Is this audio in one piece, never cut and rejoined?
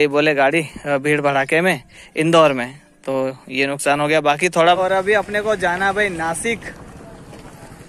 no; 1 cut; at 4.8 s

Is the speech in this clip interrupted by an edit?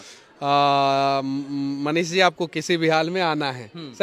no; 0 cuts

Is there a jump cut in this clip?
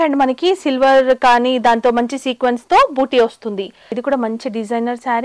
yes; 1 cut; at 4.0 s

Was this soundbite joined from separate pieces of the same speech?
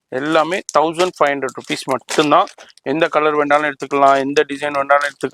no; 0 cuts

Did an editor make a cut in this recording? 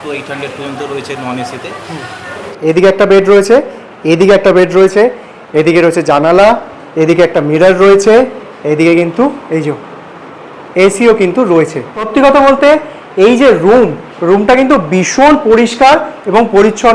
yes; 2 cuts; at 2.5 s, 12.1 s

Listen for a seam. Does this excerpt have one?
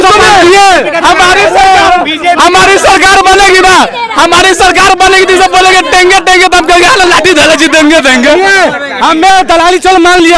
no; 0 cuts

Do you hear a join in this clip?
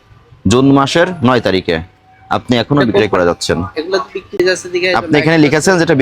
yes; 1 cut; at 4.4 s

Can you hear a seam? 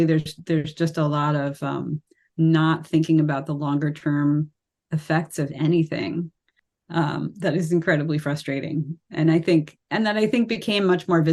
no; 0 cuts

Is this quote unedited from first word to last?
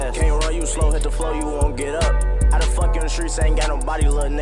yes; 0 cuts

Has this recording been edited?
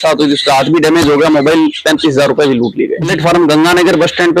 yes; 1 cut; at 3.1 s

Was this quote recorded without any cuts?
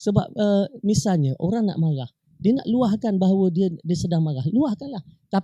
yes; 0 cuts

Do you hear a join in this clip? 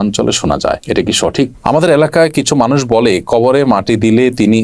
yes; 1 cut; at 1.6 s

